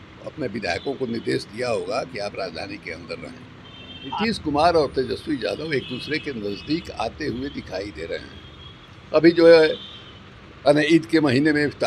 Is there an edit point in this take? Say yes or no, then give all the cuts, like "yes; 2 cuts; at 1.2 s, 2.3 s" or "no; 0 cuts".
yes; 1 cut; at 4.1 s